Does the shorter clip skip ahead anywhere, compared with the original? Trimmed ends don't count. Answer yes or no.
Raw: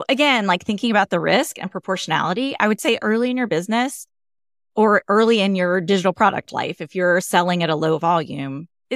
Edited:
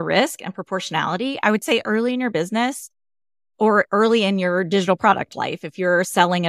no